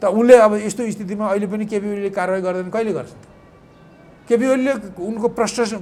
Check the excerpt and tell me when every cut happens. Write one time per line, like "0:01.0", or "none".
none

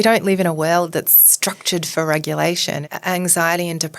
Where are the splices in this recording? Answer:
0:02.9

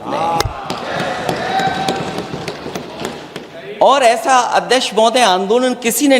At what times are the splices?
none

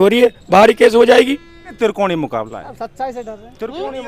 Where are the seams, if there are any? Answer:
0:01.7

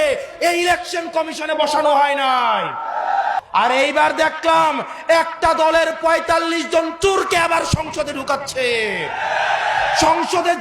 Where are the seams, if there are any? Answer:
0:03.3

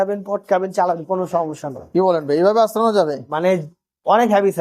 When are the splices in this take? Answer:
none

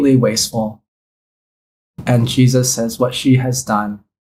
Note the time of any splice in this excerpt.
none

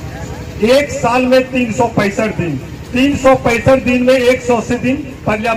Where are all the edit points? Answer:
none

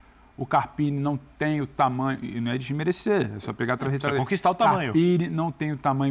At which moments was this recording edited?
none

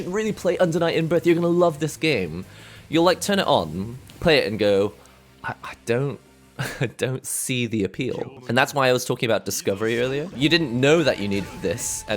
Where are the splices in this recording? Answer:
0:08.4
0:10.3

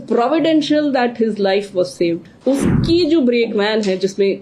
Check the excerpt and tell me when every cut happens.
0:02.3

